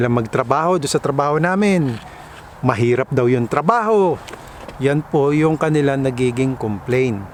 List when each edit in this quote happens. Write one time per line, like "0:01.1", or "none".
none